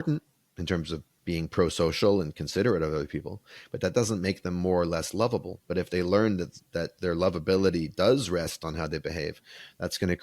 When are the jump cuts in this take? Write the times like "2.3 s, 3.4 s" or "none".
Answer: 1.1 s